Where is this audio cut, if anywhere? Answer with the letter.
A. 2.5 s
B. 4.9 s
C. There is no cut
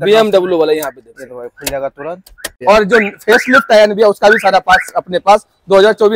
A